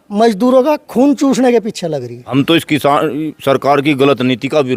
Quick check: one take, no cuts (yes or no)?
no